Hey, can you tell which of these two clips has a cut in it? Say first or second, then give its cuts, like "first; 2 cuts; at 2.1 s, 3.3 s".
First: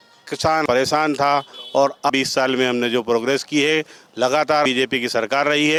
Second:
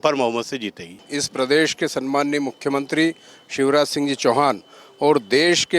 second; 1 cut; at 1.1 s